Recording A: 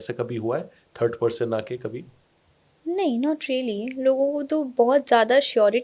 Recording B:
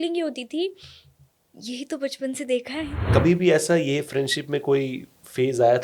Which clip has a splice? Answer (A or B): B